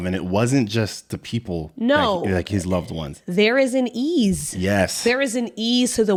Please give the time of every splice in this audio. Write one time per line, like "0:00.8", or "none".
none